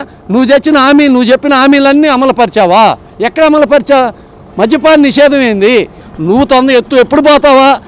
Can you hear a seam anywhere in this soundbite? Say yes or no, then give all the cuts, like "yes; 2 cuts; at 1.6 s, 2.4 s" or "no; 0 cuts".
yes; 1 cut; at 6.1 s